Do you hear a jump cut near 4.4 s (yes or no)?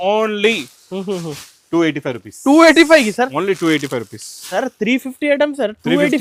no